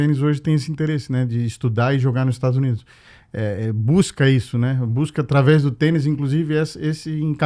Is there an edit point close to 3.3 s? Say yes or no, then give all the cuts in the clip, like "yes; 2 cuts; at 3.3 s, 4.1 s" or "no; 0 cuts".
no; 0 cuts